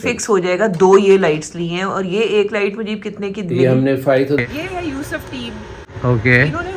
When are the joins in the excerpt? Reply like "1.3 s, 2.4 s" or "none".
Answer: 4.4 s, 5.8 s